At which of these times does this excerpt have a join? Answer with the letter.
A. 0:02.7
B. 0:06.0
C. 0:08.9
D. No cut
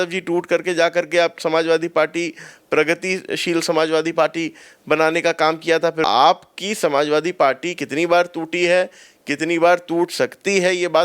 B